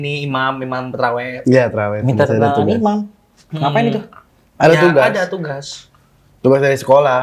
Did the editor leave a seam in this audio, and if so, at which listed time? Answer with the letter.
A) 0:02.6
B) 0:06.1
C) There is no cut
C